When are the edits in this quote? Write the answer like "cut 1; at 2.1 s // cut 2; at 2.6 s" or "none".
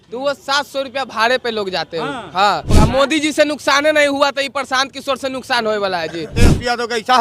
cut 1; at 2.7 s // cut 2; at 6.3 s